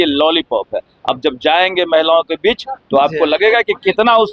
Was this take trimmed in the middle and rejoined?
no; 0 cuts

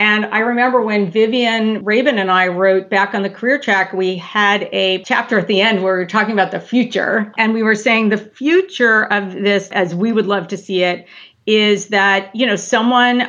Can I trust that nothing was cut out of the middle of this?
no; 2 cuts; at 1.8 s, 7.3 s

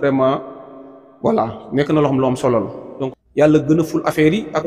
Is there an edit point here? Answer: yes; 1 cut; at 3.0 s

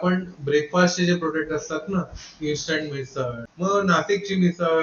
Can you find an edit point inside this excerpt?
yes; 1 cut; at 3.4 s

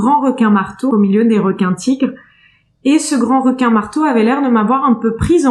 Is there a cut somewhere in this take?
yes; 1 cut; at 0.9 s

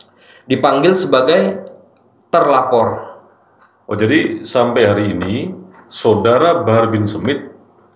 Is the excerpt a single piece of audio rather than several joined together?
yes; 0 cuts

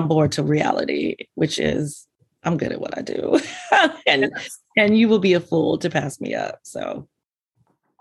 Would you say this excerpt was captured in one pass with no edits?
yes; 0 cuts

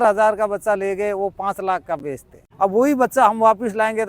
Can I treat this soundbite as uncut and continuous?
no; 1 cut; at 2.4 s

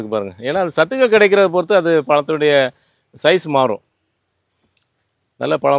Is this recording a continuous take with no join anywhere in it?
yes; 0 cuts

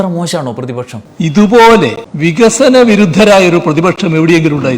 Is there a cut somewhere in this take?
yes; 1 cut; at 2.1 s

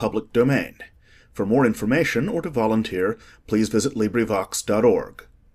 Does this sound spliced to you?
no; 0 cuts

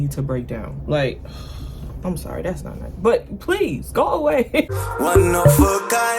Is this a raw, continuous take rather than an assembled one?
no; 1 cut; at 4.7 s

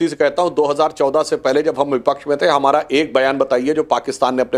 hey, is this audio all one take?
yes; 0 cuts

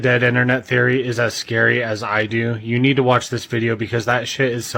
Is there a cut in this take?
no; 0 cuts

